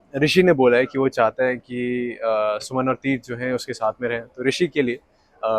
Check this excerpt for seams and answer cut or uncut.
uncut